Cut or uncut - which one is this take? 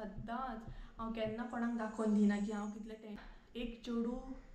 cut